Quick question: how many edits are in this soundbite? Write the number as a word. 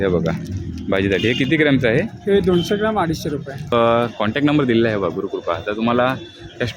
one